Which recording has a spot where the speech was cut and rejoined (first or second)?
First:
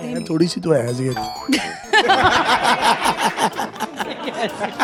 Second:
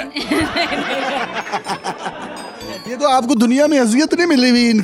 second